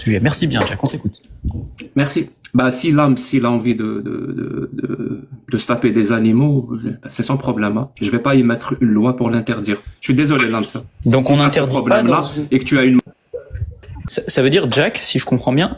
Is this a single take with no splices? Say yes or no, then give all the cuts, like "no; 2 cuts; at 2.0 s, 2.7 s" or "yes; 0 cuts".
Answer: no; 1 cut; at 13.9 s